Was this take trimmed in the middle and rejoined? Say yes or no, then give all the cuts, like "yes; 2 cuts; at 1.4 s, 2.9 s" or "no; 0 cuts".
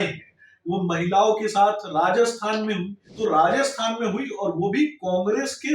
yes; 1 cut; at 3.0 s